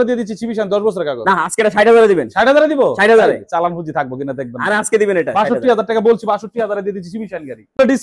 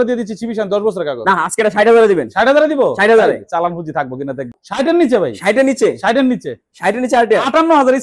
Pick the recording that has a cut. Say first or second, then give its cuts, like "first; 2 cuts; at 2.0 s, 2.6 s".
second; 1 cut; at 4.6 s